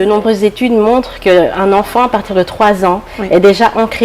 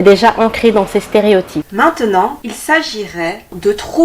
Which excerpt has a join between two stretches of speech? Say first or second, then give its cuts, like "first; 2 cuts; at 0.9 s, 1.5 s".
second; 2 cuts; at 1.7 s, 2.5 s